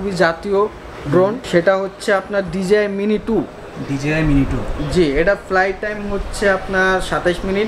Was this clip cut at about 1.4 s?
yes; 1 cut; at 1.4 s

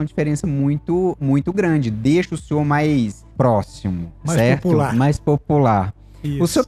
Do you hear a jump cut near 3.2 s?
yes; 1 cut; at 3.2 s

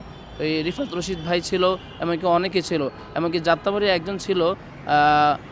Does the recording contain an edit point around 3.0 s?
no; 0 cuts

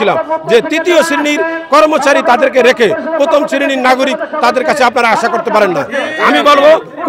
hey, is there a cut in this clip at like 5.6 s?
no; 0 cuts

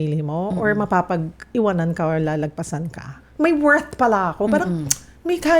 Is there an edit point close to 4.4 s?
no; 1 cut; at 3.1 s

